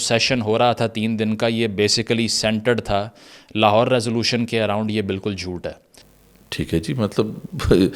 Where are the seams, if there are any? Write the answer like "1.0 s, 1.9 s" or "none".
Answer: none